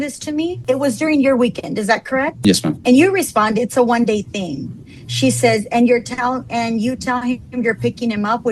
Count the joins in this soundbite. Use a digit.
1